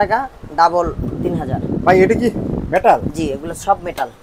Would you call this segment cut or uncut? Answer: uncut